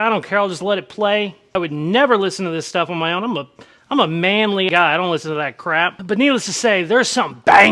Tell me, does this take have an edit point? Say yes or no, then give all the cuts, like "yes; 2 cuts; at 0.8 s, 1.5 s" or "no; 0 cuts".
yes; 2 cuts; at 1.4 s, 4.7 s